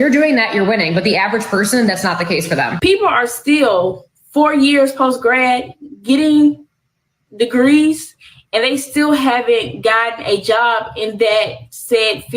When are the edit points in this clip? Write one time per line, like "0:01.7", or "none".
0:02.7